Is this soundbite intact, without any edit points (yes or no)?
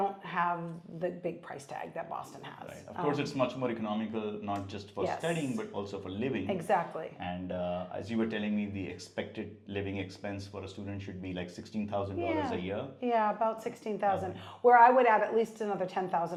yes